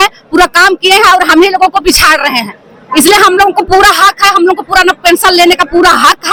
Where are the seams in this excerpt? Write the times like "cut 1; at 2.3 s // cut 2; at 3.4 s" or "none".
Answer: none